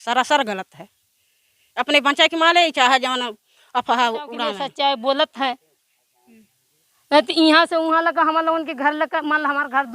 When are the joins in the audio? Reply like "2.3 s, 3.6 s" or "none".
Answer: 4.6 s